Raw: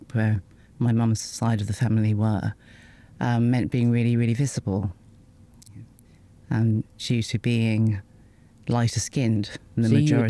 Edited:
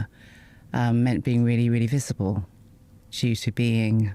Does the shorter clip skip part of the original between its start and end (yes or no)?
yes